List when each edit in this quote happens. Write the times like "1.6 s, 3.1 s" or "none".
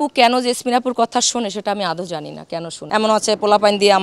2.8 s

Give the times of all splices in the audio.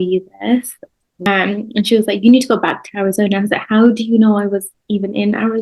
1.3 s

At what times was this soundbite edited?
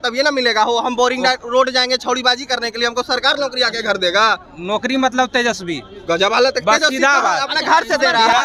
none

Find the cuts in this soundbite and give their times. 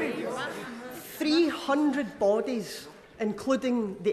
none

